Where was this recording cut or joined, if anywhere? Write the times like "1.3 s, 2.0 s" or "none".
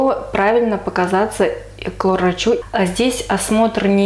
2.6 s